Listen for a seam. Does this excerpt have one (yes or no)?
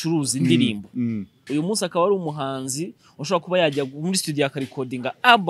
yes